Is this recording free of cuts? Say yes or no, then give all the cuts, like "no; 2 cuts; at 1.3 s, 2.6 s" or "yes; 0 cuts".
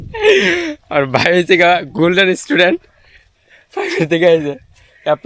yes; 0 cuts